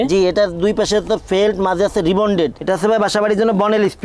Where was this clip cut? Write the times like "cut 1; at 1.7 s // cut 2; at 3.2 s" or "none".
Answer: cut 1; at 2.6 s

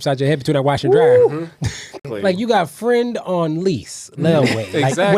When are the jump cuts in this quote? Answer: cut 1; at 2.1 s

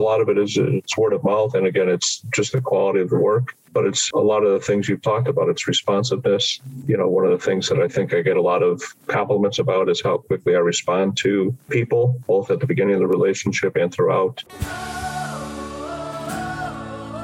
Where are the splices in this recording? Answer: cut 1; at 7.7 s // cut 2; at 14.5 s

